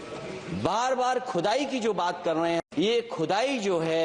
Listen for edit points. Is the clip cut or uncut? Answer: cut